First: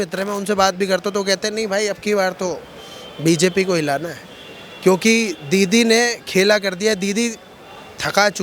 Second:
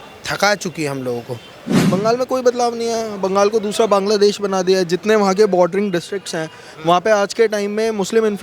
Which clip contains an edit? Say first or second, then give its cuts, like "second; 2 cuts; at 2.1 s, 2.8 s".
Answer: second; 1 cut; at 1.7 s